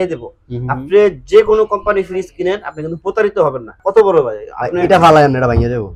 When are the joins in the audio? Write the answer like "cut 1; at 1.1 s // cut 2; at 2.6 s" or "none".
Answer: cut 1; at 3.7 s